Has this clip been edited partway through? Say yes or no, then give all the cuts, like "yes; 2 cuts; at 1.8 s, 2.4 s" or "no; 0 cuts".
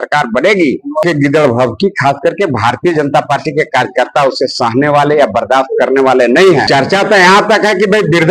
yes; 2 cuts; at 1.0 s, 6.7 s